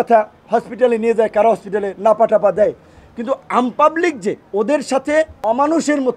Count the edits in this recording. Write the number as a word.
two